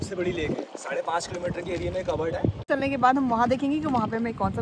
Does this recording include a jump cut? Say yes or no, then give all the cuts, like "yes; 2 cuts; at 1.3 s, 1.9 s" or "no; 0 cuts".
yes; 1 cut; at 2.6 s